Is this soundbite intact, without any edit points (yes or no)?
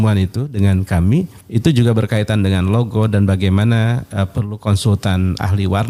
no